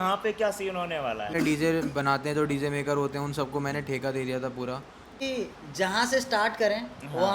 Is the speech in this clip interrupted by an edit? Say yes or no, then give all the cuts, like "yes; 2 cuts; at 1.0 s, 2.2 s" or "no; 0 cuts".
yes; 2 cuts; at 1.3 s, 5.2 s